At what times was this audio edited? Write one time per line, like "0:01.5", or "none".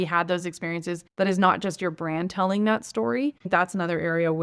0:01.0
0:03.5